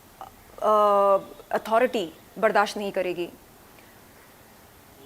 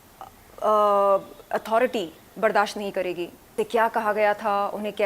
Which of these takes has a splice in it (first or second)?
second